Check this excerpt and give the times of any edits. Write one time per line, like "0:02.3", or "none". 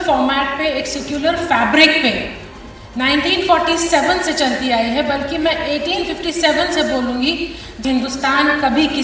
0:07.7